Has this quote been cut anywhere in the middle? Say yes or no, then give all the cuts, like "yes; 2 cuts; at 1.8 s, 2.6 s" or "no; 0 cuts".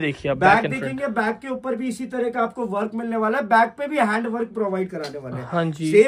no; 0 cuts